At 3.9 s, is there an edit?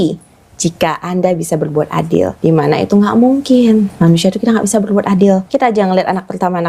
no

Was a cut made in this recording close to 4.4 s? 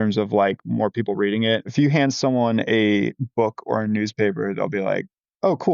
no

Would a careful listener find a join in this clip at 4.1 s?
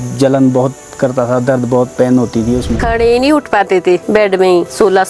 no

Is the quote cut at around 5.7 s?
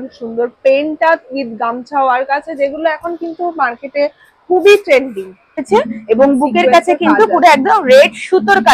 yes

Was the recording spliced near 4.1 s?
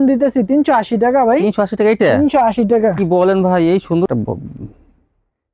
yes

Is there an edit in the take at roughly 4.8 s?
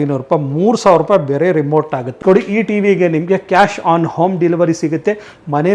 no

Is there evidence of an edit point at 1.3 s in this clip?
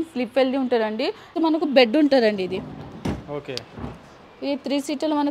yes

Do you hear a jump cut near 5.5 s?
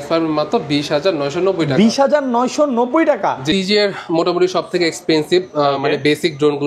no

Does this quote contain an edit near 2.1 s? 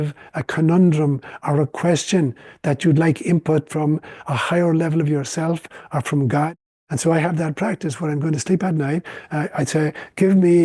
no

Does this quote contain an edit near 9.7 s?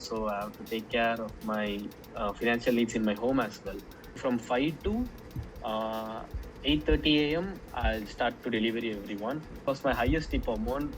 yes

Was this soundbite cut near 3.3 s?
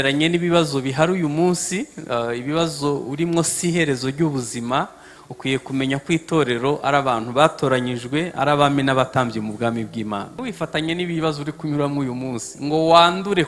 no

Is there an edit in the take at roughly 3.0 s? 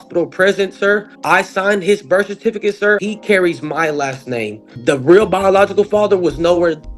yes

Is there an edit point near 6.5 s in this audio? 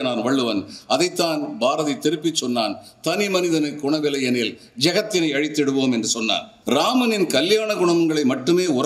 yes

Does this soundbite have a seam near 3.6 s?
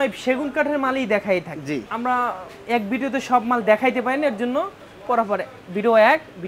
no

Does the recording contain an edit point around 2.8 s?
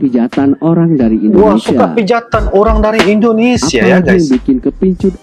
no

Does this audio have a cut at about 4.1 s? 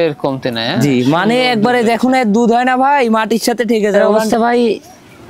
yes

